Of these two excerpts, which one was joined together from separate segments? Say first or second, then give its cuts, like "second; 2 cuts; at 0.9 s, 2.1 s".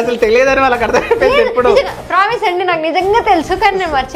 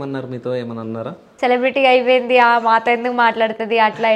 second; 1 cut; at 1.3 s